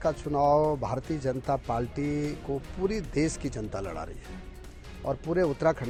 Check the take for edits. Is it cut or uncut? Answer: uncut